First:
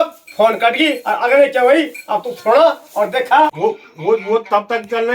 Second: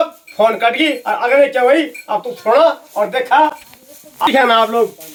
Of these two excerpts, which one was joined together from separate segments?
first; 1 cut; at 3.5 s

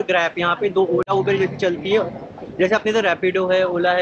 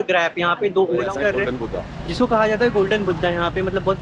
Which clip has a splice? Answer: second; 1 cut; at 1.1 s

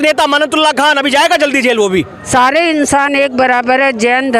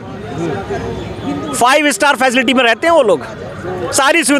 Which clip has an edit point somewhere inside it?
first; 1 cut; at 2.2 s

